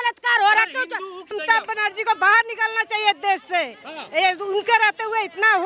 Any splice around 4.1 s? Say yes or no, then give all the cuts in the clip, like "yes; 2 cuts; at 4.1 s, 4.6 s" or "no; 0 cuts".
no; 1 cut; at 1.2 s